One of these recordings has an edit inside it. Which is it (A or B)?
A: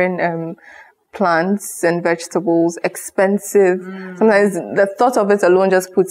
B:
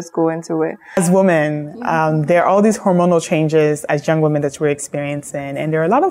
B